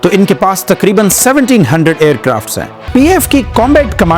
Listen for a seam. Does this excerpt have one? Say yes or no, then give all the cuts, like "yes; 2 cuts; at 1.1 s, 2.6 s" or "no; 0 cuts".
yes; 1 cut; at 2.7 s